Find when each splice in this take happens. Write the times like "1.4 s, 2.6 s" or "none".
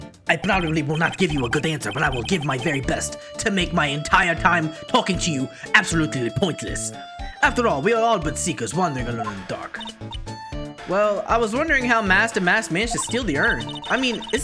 none